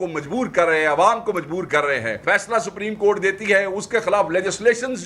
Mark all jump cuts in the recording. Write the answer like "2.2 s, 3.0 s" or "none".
2.2 s